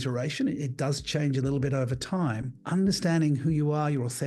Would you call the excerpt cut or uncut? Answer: cut